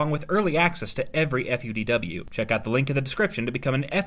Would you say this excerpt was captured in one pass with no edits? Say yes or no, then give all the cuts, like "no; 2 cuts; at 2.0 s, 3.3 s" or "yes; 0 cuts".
no; 1 cut; at 2.2 s